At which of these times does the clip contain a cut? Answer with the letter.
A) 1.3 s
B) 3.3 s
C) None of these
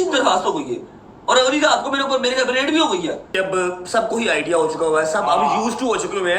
B